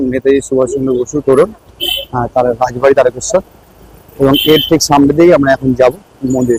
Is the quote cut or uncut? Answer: uncut